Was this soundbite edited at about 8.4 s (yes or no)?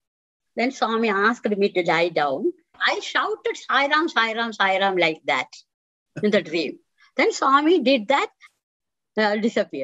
yes